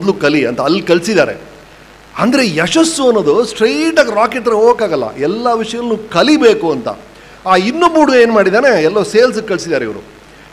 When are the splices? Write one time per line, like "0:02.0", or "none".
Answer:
none